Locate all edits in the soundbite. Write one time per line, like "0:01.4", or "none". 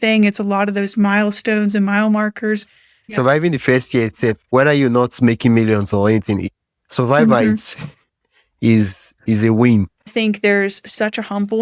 0:03.1
0:10.0

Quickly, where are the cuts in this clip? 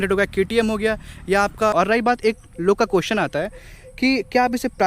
0:01.7

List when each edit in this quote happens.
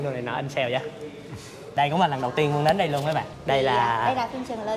0:01.8
0:03.3

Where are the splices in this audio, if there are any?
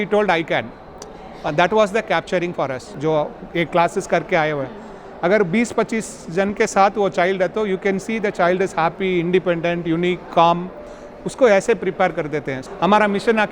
0:02.9
0:12.6

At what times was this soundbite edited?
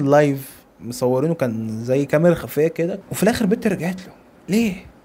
0:03.0

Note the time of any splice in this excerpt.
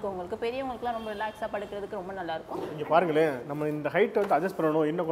0:02.7

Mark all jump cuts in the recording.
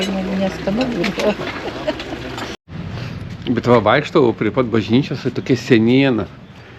0:02.6

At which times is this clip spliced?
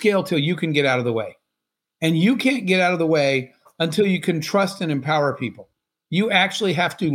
none

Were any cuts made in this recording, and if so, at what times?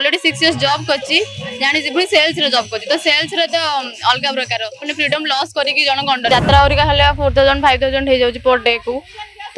0:06.3

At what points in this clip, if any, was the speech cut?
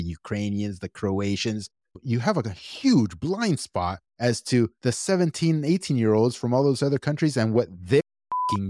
0:04.0
0:04.8

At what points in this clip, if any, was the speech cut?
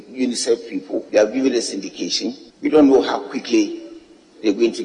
0:01.1
0:02.4

